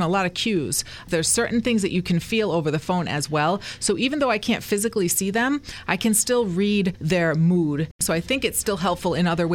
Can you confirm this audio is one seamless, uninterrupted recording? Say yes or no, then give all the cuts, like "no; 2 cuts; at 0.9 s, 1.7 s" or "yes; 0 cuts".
no; 3 cuts; at 1.1 s, 7.0 s, 8.0 s